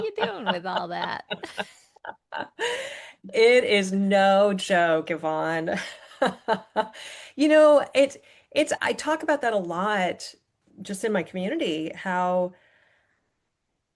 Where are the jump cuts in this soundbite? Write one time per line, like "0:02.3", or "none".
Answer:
none